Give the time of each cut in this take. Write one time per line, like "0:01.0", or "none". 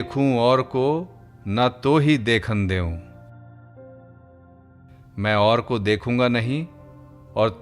0:03.0
0:05.1